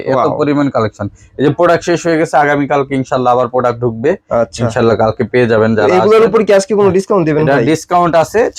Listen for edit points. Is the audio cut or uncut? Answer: uncut